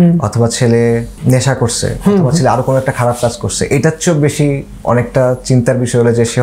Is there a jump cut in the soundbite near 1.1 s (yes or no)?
yes